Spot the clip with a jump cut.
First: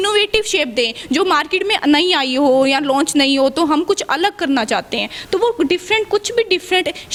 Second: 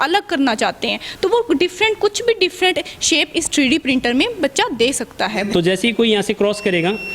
second; 1 cut; at 5.5 s

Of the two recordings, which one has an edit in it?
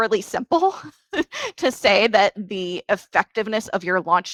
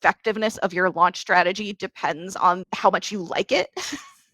second; 1 cut; at 2.7 s

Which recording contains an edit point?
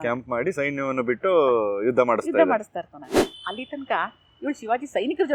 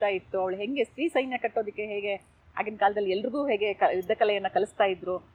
first; 1 cut; at 3.2 s

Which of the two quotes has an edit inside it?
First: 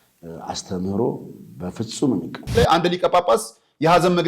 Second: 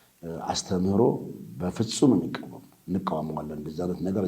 first; 1 cut; at 2.5 s

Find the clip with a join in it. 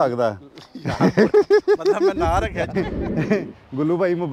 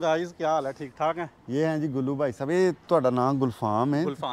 first; 1 cut; at 2.7 s

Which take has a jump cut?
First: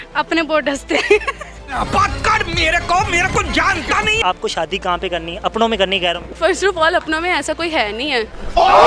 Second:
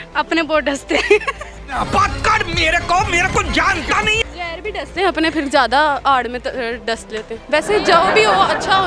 first; 2 cuts; at 4.2 s, 6.3 s

